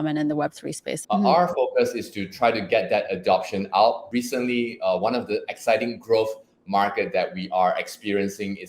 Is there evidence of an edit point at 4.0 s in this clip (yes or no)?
yes